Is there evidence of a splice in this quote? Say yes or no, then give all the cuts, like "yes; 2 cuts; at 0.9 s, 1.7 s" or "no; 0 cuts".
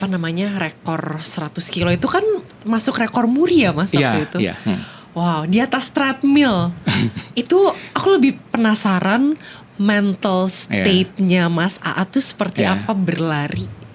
no; 0 cuts